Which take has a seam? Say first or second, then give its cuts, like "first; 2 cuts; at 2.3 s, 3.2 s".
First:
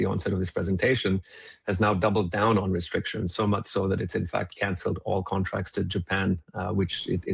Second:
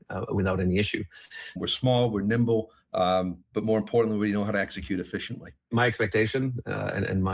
second; 2 cuts; at 1.6 s, 5.7 s